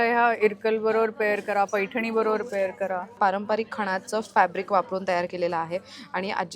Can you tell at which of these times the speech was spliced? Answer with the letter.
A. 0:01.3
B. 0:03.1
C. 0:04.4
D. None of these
B